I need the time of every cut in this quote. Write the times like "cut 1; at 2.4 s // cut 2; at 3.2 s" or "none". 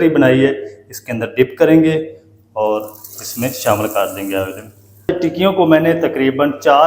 cut 1; at 5.1 s

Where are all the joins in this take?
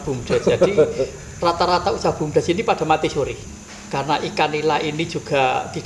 cut 1; at 3.4 s

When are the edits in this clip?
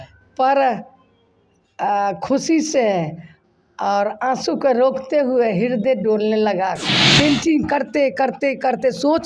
cut 1; at 6.9 s

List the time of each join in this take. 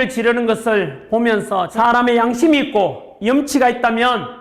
cut 1; at 1.7 s

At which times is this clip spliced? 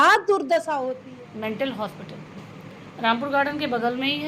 cut 1; at 0.9 s

